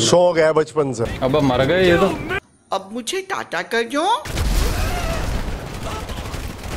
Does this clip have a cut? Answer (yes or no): yes